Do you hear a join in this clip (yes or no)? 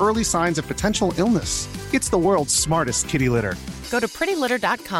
no